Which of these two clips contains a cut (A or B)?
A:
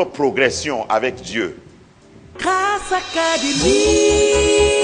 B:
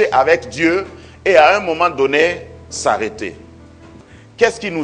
A